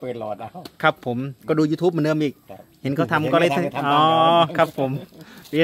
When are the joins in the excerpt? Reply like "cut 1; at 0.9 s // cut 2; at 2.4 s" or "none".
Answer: none